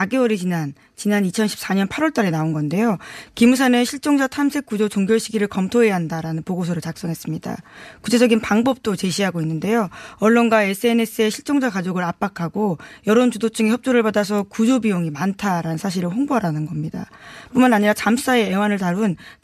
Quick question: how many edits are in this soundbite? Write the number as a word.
zero